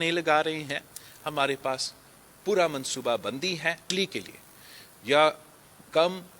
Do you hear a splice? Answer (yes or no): yes